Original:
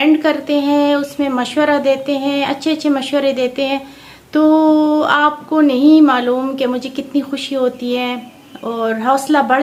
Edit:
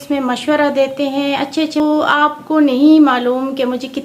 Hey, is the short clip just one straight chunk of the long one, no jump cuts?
no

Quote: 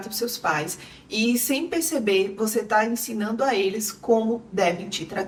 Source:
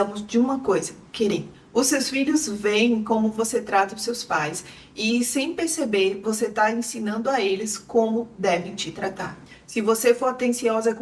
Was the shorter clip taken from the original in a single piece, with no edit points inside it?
yes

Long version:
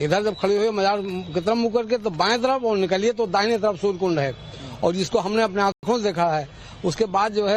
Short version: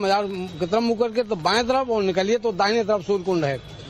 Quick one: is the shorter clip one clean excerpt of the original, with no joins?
yes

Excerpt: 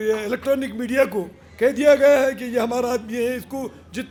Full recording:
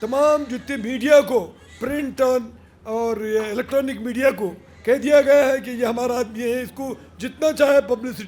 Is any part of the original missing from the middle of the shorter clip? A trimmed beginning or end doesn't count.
no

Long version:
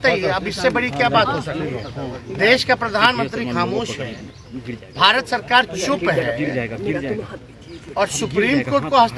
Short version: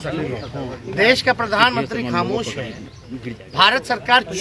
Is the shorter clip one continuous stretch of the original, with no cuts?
yes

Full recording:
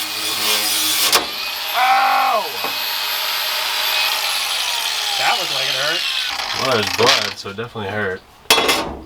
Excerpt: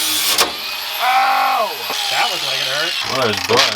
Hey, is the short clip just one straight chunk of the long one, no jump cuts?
no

